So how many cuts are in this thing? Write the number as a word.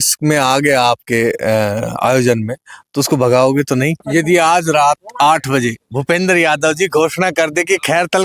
one